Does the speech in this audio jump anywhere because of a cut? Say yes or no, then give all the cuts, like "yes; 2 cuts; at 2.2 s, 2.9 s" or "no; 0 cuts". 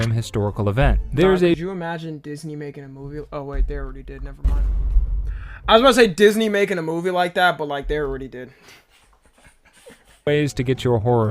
yes; 1 cut; at 10.3 s